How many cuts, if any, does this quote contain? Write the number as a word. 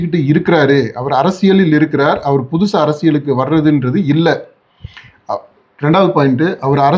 zero